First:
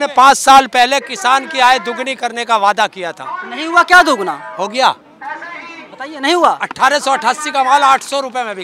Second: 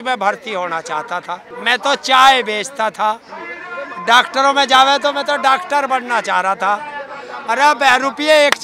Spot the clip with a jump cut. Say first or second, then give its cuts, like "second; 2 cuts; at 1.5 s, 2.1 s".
second; 1 cut; at 1.5 s